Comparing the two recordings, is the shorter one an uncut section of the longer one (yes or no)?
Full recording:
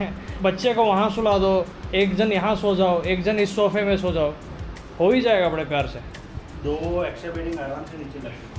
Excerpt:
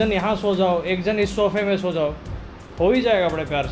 yes